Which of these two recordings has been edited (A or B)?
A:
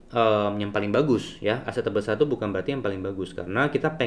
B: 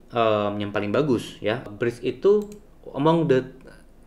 B